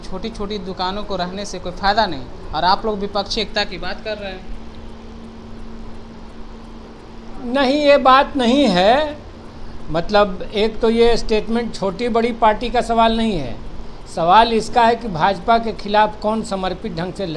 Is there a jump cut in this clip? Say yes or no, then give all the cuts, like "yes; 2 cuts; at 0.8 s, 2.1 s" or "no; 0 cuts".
no; 0 cuts